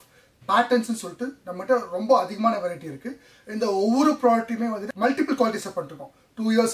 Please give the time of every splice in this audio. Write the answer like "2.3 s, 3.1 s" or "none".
4.8 s